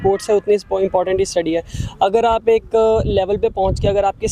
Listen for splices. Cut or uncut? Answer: uncut